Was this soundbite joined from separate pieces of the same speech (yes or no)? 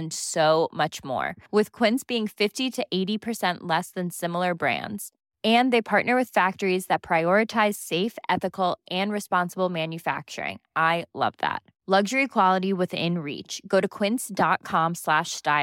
no